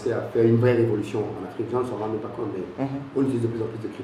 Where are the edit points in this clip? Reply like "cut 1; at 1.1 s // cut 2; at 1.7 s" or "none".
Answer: none